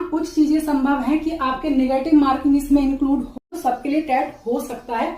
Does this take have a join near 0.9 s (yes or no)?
no